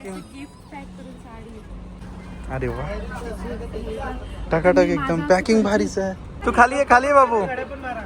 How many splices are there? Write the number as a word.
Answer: two